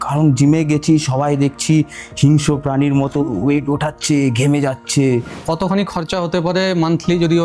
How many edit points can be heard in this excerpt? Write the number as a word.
one